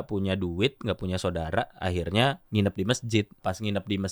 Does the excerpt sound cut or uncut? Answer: cut